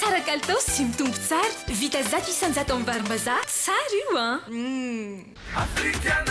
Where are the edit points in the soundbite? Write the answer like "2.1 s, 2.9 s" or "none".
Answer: 5.3 s